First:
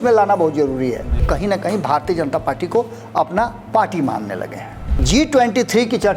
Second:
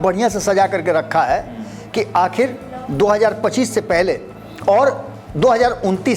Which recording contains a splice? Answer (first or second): first